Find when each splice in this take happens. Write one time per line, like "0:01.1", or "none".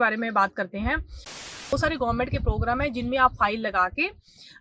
0:01.5